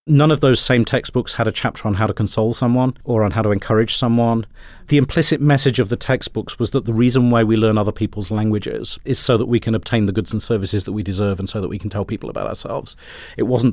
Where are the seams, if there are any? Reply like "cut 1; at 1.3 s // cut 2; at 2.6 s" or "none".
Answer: cut 1; at 3.0 s // cut 2; at 4.8 s // cut 3; at 9.0 s